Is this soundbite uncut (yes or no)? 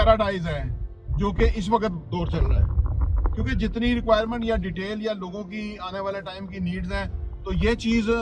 yes